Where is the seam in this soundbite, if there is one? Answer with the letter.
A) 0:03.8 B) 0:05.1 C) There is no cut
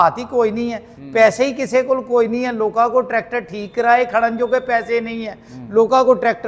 C